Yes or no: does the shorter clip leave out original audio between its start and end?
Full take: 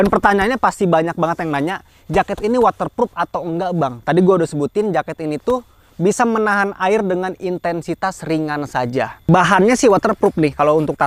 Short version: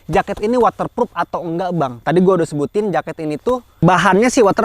yes